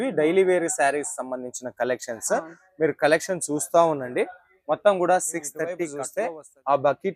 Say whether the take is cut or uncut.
cut